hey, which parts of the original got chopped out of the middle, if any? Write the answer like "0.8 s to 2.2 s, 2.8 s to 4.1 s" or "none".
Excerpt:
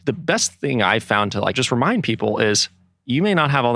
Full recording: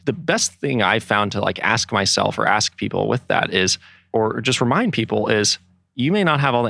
1.6 s to 4.5 s